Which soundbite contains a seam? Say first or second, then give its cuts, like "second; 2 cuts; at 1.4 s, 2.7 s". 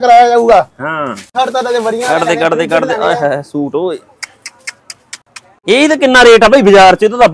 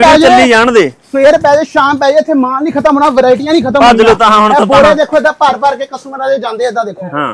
first; 2 cuts; at 1.3 s, 5.6 s